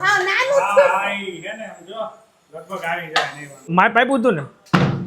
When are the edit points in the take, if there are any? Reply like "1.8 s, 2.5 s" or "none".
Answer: 3.5 s